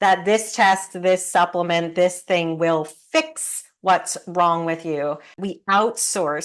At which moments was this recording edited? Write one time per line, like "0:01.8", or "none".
0:05.5